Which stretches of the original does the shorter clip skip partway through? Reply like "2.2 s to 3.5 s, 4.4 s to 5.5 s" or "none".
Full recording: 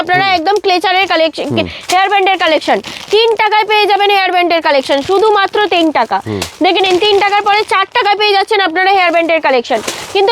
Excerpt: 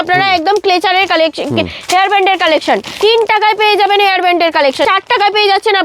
2.9 s to 3.0 s, 5.0 s to 7.7 s

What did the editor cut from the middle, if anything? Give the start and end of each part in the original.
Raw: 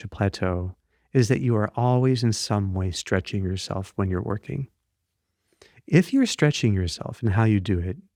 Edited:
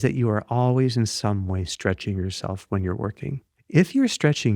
4.8 s to 5.7 s

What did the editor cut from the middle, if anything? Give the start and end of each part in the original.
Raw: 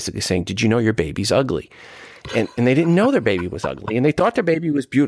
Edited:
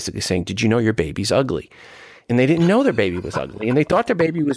2.2 s to 2.5 s

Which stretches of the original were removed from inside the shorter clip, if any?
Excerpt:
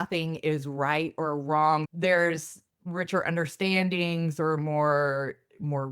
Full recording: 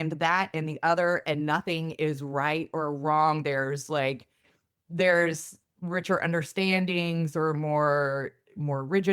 3.4 s to 4.8 s

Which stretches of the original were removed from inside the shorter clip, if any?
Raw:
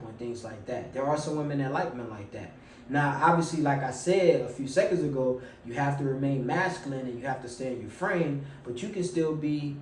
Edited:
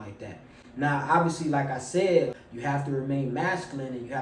4.6 s to 5.6 s

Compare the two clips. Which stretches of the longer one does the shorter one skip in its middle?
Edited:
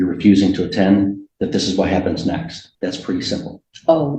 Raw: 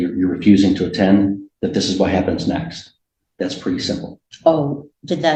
2.8 s to 3.2 s

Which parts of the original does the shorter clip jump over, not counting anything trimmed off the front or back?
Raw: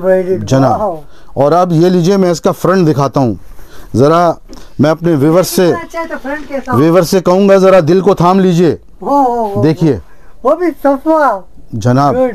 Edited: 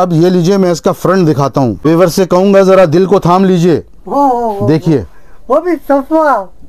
3.4 s to 6.8 s

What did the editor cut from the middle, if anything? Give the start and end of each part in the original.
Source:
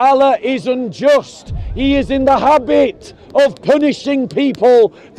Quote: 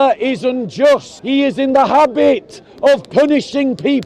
1.4 s to 1.7 s

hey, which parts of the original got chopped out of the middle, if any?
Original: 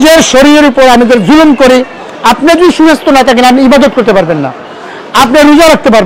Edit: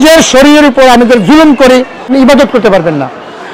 2.1 s to 3.5 s

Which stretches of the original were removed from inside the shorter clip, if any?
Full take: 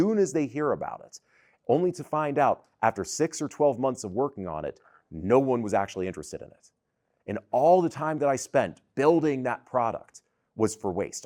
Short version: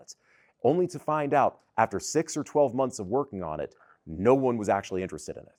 none

